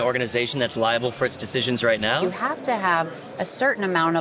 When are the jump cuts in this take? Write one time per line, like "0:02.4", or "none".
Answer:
0:02.2